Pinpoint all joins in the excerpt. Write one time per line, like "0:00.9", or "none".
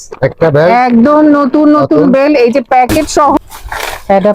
0:03.4

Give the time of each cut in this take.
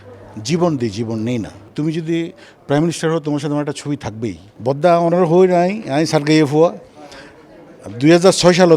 0:01.7
0:04.5

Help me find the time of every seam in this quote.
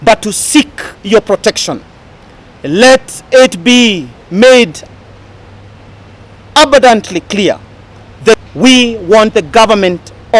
0:08.3

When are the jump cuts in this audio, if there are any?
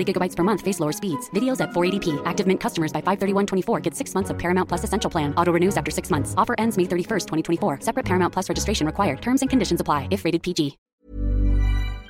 0:10.9

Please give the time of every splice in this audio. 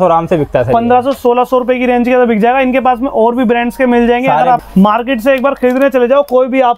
0:04.6

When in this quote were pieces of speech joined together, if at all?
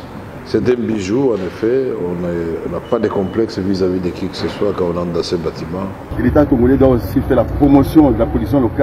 0:06.0

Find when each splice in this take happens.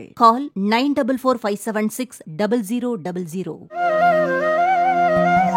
0:03.6

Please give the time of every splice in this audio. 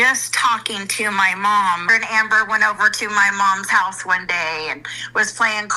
0:01.8

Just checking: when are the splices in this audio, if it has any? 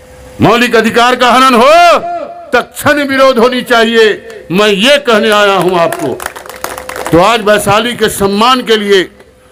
none

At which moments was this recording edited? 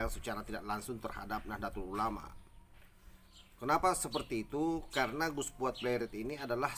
none

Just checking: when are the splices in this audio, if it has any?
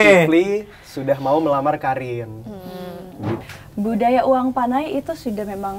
0:03.5

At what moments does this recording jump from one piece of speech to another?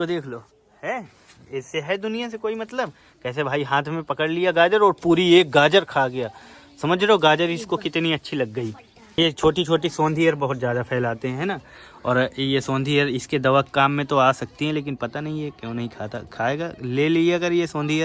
0:09.2

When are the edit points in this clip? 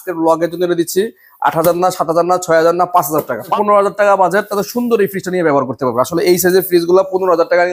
0:03.5

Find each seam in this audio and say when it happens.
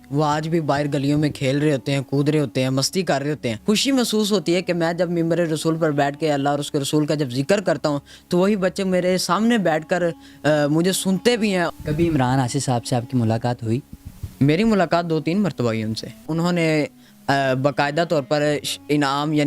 0:03.6
0:11.8
0:16.3

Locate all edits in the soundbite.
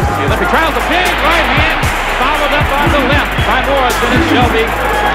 0:01.4

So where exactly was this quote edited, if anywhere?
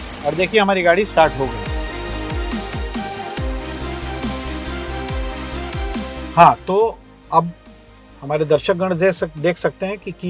none

